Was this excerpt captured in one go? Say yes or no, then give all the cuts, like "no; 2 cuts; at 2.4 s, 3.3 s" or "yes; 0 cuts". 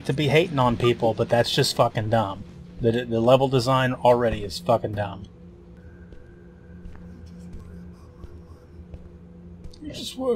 no; 1 cut; at 5.8 s